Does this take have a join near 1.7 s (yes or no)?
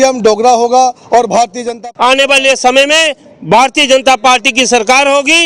yes